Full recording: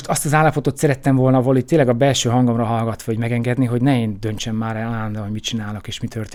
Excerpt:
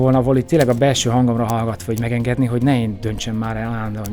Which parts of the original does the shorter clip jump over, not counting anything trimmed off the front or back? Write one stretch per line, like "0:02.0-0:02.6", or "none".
none